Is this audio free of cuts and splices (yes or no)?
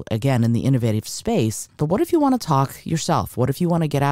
no